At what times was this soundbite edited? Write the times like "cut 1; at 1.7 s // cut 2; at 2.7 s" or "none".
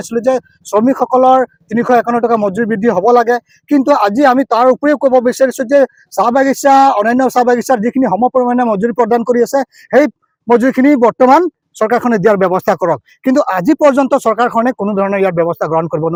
none